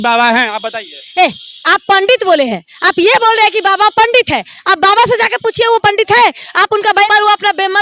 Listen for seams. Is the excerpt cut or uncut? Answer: cut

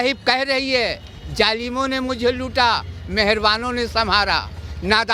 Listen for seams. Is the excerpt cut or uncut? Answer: uncut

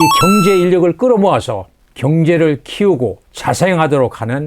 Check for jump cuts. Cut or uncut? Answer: cut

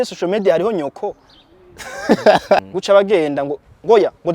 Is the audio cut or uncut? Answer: cut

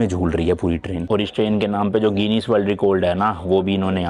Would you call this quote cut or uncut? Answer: cut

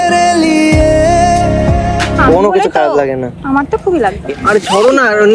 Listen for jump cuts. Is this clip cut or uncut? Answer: cut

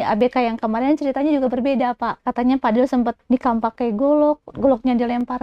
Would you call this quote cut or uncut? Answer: cut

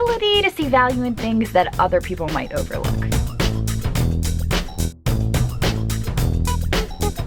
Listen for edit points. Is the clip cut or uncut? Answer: uncut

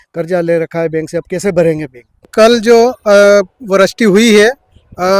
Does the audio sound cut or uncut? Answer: cut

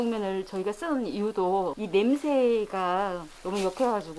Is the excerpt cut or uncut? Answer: cut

